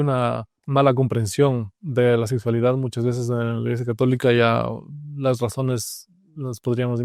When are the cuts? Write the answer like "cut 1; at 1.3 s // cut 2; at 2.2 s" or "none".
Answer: none